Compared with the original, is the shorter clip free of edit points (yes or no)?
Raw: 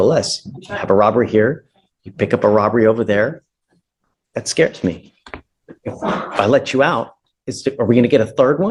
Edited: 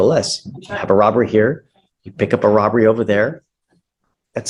yes